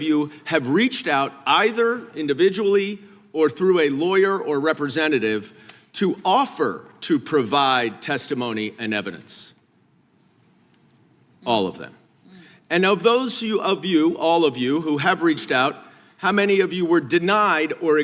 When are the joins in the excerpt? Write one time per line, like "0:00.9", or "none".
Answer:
none